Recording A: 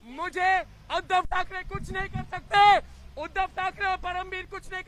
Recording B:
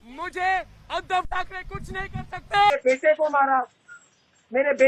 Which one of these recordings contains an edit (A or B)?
B